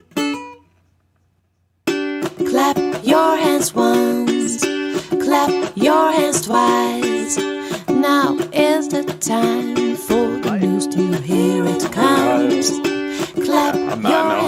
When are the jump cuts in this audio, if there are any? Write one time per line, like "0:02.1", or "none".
none